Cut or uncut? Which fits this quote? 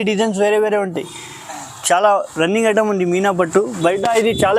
uncut